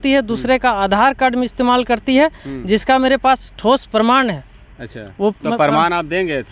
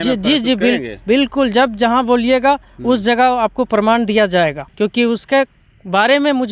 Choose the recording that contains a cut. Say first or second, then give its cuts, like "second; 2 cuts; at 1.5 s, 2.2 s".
second; 1 cut; at 4.6 s